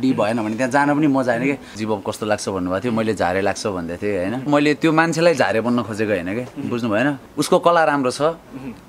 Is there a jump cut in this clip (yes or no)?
yes